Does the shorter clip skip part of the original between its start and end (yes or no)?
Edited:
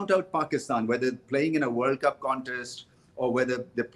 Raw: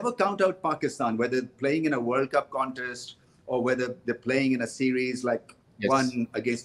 no